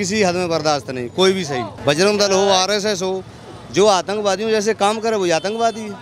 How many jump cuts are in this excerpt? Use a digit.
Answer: 1